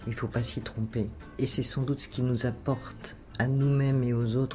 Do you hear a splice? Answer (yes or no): no